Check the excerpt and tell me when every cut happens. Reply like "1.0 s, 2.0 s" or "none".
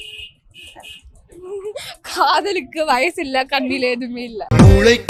none